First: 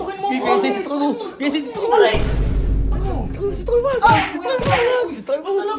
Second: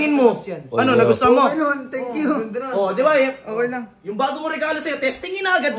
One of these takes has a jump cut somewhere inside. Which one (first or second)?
first